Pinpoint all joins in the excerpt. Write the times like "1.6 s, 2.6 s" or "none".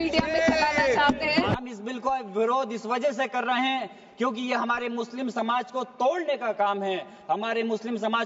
1.6 s